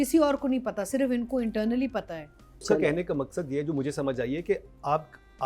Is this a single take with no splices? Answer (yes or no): no